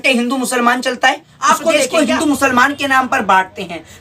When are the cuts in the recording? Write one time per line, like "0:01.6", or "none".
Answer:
0:01.6

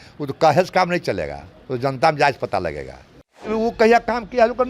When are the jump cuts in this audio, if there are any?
0:03.5

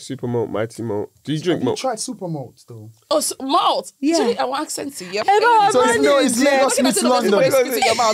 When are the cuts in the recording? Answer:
0:05.1

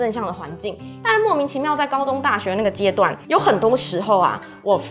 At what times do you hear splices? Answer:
none

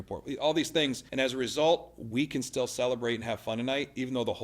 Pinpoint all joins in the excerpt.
0:01.0

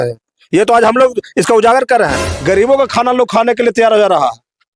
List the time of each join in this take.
0:02.3

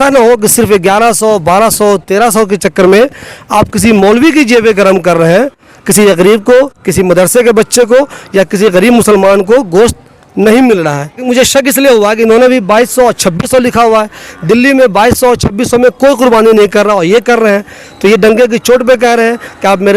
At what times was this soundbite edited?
0:11.2

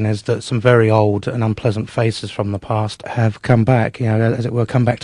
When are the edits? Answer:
0:03.1

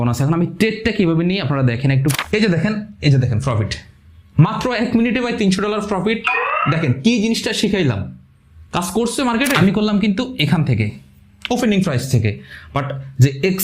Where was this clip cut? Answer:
0:02.1
0:09.6

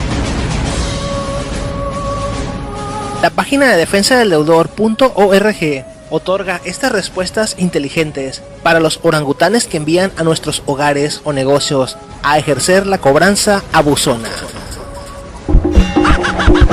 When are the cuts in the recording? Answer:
0:08.4

